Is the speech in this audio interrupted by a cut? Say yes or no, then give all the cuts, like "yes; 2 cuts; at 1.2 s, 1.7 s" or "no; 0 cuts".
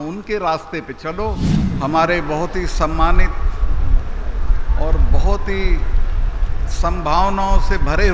yes; 1 cut; at 1.5 s